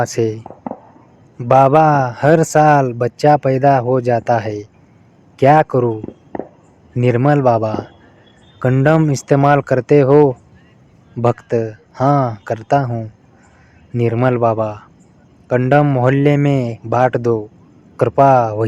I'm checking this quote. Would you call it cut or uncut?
uncut